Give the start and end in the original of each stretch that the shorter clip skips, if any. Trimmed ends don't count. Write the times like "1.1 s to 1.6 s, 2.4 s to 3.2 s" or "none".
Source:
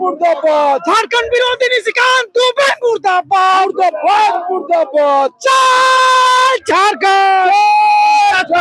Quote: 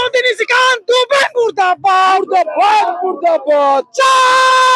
none